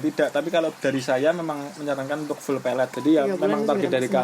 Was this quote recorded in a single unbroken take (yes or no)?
no